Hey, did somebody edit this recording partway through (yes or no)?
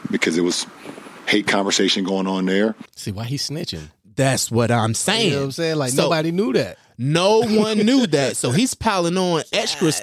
no